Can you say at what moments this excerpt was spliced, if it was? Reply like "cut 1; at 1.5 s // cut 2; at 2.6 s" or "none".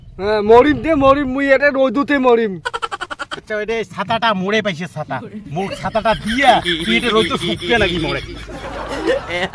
cut 1; at 3.5 s

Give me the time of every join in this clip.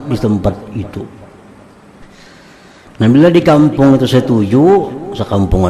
cut 1; at 2.2 s

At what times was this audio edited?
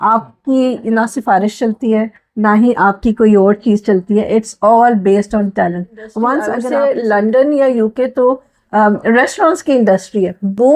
cut 1; at 6.6 s

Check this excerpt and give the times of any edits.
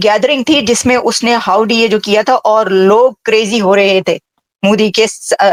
none

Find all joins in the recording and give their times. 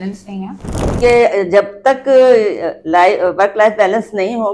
cut 1; at 1.0 s

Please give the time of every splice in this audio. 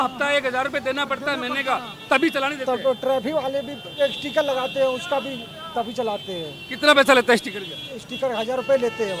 none

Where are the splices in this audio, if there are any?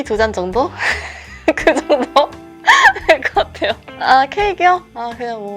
none

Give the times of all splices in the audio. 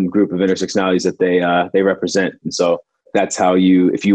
cut 1; at 3.1 s

